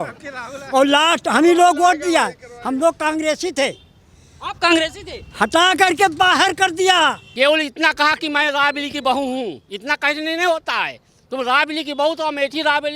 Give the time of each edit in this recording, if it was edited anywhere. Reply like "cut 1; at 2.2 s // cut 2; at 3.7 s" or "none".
cut 1; at 7.2 s